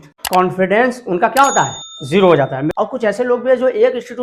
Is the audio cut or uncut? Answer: cut